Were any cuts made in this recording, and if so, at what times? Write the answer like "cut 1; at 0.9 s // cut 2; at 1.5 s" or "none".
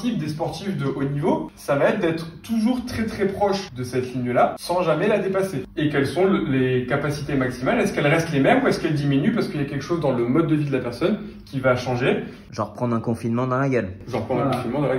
cut 1; at 1.5 s // cut 2; at 3.7 s // cut 3; at 4.6 s // cut 4; at 5.6 s // cut 5; at 12.4 s